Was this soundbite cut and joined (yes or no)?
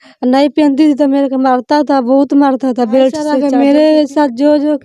yes